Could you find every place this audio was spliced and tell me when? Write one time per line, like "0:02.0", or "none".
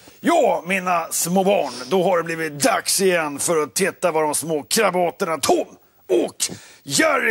none

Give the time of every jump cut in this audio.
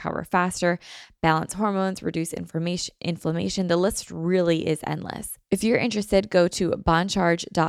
0:05.3

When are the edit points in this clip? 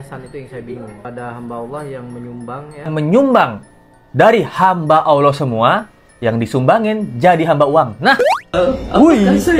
0:01.0
0:02.9
0:08.5

